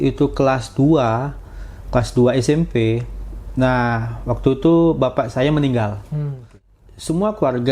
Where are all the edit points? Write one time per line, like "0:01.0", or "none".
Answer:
0:06.7